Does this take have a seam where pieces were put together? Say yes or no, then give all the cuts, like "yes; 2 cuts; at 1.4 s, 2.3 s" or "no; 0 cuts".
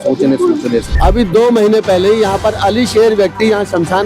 yes; 1 cut; at 0.9 s